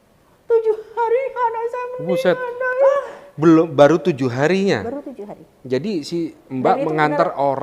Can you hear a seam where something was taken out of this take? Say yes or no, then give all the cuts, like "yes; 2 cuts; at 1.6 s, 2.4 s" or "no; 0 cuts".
yes; 1 cut; at 2.9 s